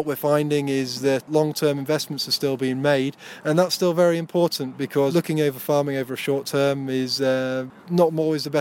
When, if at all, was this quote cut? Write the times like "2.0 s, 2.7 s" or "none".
1.2 s, 5.1 s, 7.8 s